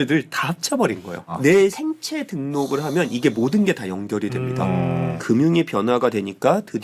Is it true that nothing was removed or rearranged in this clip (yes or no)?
no